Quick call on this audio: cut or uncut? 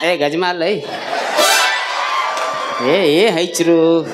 uncut